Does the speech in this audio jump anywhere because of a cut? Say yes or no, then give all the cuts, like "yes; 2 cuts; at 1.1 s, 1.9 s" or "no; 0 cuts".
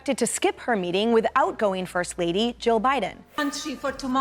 yes; 1 cut; at 3.2 s